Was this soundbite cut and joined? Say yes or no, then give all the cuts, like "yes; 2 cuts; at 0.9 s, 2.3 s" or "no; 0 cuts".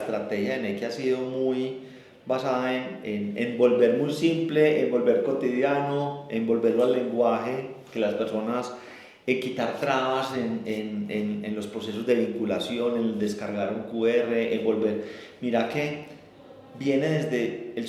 no; 0 cuts